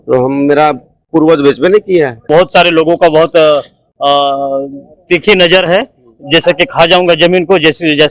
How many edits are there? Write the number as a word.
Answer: one